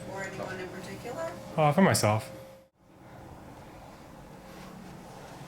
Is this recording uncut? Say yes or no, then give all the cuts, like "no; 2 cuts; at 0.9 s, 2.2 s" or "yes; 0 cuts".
no; 1 cut; at 2.5 s